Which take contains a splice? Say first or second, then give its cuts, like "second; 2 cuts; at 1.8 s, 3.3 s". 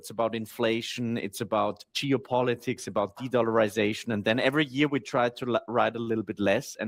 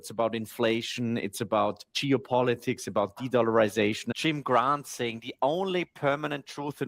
second; 1 cut; at 4.1 s